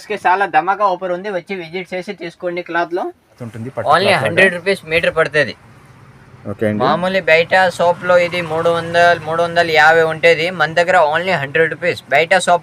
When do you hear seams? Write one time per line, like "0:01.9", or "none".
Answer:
0:03.5